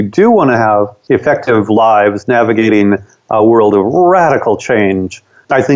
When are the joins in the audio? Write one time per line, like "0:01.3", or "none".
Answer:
0:01.0